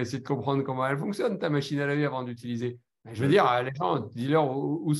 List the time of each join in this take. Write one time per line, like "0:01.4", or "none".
none